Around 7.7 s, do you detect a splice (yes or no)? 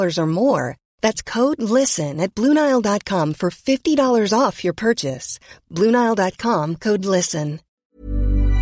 yes